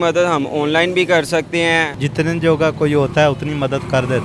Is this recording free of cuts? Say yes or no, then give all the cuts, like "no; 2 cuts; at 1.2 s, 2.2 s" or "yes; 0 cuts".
no; 1 cut; at 2.0 s